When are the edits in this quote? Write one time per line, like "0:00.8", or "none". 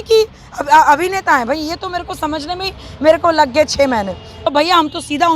0:04.3